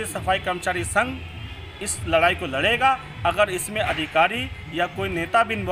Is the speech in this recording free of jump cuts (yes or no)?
yes